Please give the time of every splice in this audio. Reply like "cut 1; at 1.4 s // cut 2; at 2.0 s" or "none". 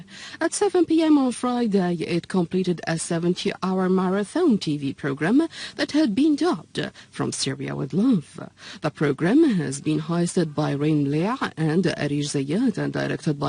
none